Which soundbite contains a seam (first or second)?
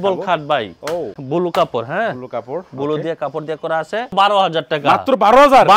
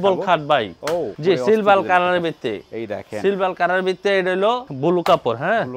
first